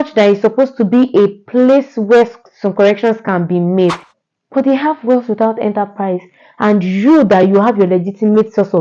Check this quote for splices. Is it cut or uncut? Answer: cut